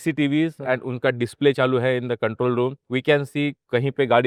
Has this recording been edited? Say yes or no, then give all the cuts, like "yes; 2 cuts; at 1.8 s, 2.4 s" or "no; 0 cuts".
no; 0 cuts